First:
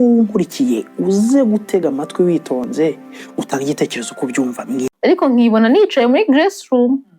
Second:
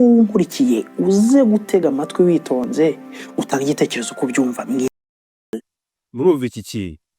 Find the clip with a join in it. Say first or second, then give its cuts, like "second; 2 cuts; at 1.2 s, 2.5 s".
first; 1 cut; at 4.9 s